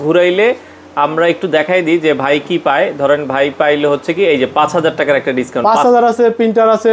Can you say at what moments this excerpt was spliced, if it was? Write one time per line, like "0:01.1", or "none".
none